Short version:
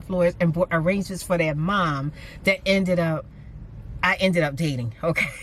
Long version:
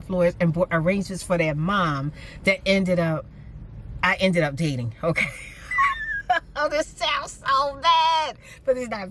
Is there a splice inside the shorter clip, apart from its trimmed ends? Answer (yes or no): no